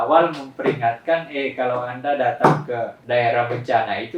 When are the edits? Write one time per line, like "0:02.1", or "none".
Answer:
0:03.0